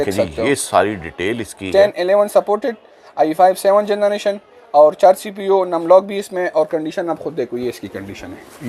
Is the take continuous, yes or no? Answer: yes